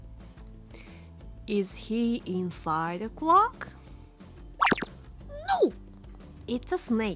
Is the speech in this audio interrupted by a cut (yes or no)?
yes